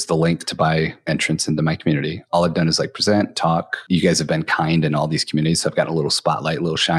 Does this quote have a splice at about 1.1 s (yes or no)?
yes